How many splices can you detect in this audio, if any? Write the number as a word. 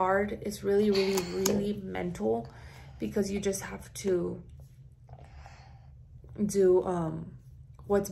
zero